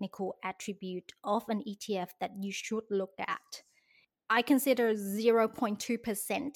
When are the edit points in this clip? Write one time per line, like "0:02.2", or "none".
0:04.0